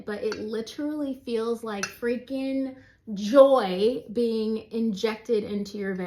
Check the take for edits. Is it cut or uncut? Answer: uncut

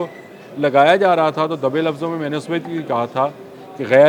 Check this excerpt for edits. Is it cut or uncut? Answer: uncut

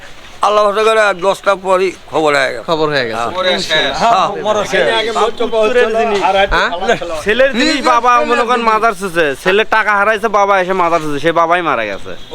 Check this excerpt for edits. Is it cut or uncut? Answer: uncut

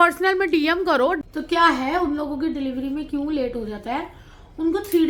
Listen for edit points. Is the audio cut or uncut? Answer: uncut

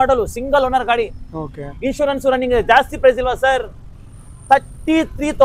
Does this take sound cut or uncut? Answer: uncut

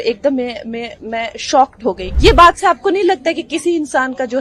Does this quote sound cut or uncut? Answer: cut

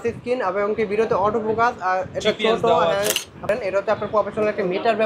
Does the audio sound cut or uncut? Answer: cut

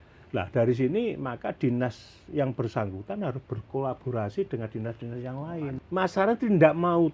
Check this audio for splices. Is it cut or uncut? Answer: cut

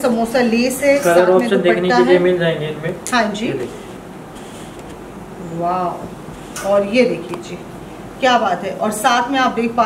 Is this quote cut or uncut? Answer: uncut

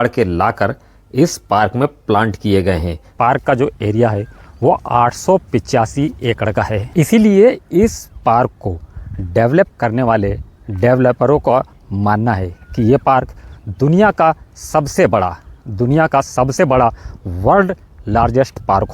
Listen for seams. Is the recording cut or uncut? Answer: cut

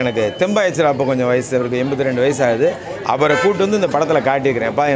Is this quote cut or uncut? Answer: uncut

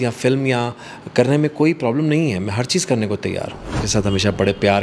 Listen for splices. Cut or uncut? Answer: cut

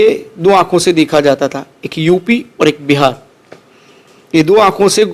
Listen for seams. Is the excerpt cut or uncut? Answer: uncut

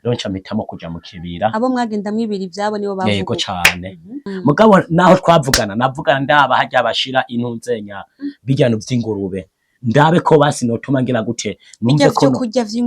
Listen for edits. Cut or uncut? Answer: cut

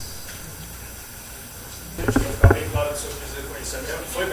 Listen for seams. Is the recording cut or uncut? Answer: cut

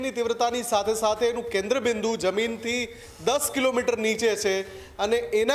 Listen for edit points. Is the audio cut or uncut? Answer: uncut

